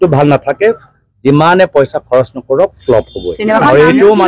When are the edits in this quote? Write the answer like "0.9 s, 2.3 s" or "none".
none